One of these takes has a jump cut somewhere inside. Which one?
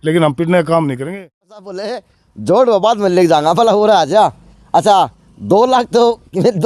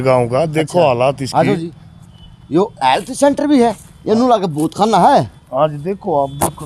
first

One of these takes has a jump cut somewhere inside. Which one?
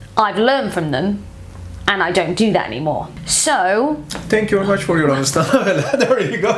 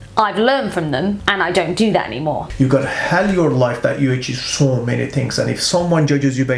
second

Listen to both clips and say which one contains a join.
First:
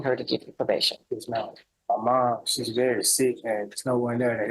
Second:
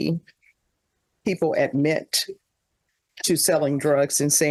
first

